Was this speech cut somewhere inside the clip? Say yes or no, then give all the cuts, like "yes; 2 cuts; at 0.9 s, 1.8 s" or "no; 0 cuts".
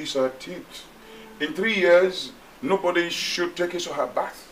no; 0 cuts